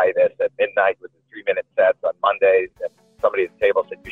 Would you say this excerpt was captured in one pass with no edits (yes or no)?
yes